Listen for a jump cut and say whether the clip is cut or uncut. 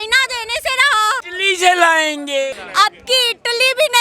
cut